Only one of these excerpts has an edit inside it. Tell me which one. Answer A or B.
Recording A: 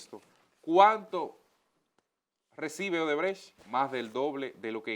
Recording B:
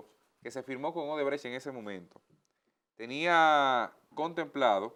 A